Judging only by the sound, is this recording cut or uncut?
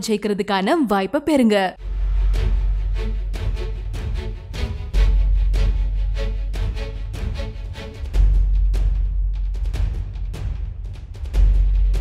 uncut